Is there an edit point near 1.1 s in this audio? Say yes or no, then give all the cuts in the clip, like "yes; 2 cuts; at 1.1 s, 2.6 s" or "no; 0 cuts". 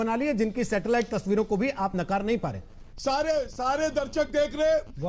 no; 1 cut; at 2.8 s